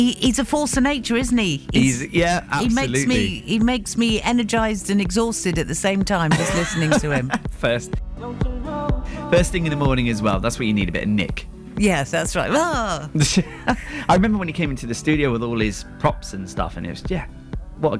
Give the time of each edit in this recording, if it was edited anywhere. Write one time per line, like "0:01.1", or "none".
none